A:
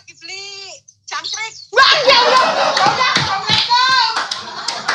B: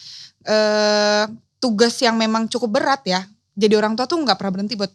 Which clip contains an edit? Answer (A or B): B